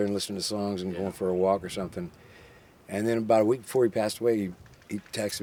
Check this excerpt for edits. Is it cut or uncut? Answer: uncut